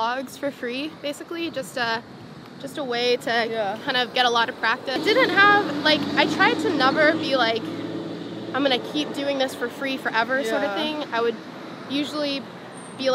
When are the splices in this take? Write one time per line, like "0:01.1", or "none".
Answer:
0:05.0